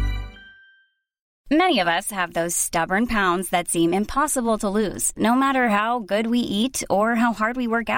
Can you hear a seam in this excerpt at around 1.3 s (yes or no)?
yes